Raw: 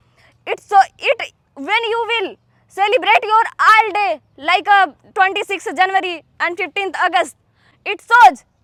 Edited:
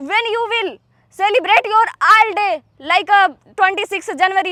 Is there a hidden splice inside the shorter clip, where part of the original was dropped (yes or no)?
no